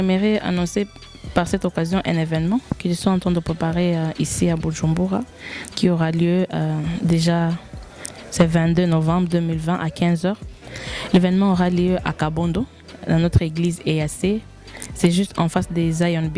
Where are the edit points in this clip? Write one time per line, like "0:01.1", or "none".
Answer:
none